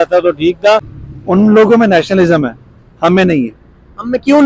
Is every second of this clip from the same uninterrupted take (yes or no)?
no